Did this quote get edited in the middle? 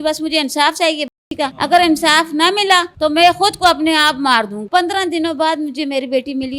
yes; 3 cuts; at 1.5 s, 2.9 s, 4.6 s

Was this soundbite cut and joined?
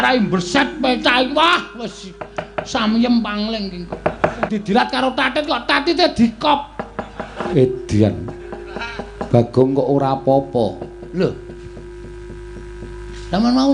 yes; 2 cuts; at 4.4 s, 7.4 s

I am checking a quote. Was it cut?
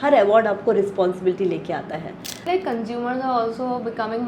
yes; 1 cut; at 2.4 s

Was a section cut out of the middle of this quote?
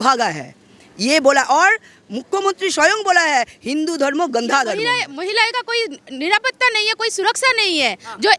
yes; 1 cut; at 5.0 s

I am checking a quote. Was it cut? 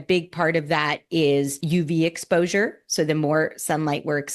yes; 1 cut; at 1.6 s

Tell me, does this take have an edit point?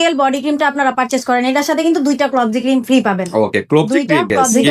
no; 0 cuts

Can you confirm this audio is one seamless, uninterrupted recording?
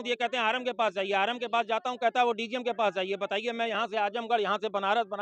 yes; 0 cuts

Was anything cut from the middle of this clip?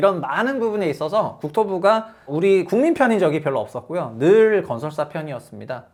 no; 0 cuts

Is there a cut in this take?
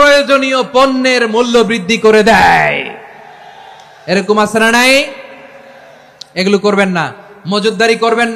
no; 0 cuts

